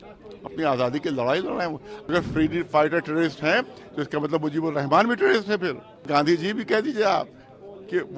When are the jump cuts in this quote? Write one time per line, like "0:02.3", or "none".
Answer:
0:02.1
0:06.1